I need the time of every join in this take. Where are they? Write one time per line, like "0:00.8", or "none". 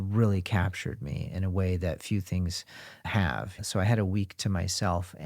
0:03.6

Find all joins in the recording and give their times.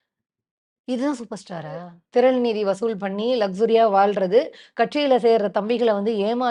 0:02.0

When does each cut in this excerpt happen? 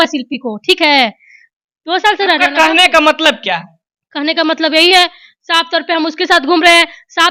none

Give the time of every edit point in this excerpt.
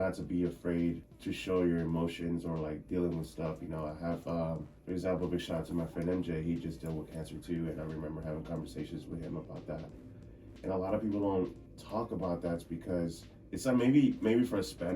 0:01.1
0:04.7
0:13.3

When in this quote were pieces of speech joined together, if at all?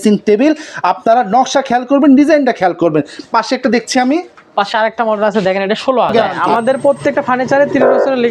0:06.1

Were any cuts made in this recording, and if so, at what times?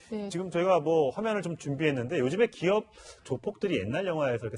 0:02.3

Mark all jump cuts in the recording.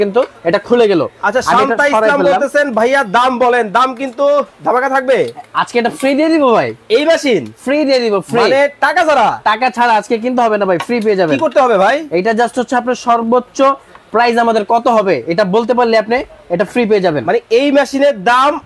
none

